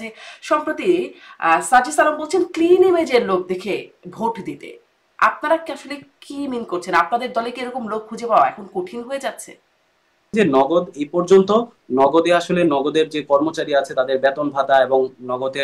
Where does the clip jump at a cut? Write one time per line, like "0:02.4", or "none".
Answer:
0:10.3